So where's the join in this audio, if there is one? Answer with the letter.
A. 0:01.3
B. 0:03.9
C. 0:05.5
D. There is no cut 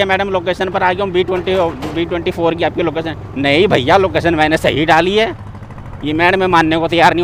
D